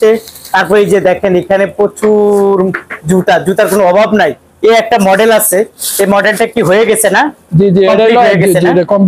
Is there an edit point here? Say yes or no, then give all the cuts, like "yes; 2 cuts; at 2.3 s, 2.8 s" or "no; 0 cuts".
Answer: no; 0 cuts